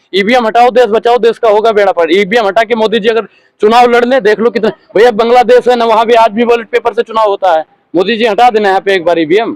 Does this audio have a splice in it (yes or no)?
no